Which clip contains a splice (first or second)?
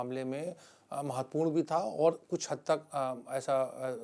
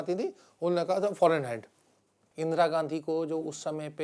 second